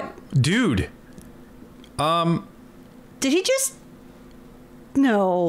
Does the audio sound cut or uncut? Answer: uncut